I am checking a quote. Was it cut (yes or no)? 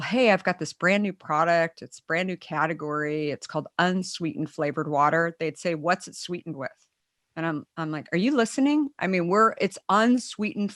no